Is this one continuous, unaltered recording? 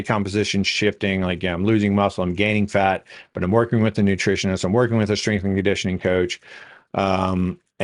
yes; 0 cuts

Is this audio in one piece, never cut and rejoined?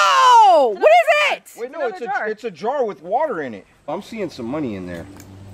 no; 1 cut; at 3.9 s

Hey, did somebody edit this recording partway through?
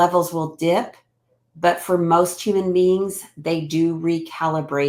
no; 0 cuts

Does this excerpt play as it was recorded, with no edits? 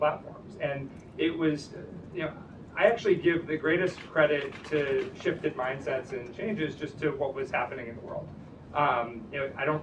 yes; 0 cuts

